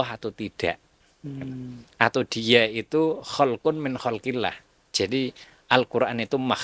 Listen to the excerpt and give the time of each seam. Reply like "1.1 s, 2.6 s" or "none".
none